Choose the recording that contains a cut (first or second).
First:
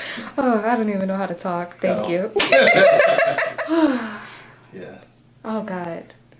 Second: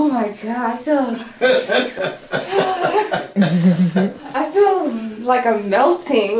first